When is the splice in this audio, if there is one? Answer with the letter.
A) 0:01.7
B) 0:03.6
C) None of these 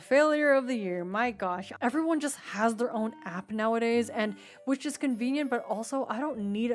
A